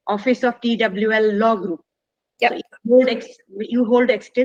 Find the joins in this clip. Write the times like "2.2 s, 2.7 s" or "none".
none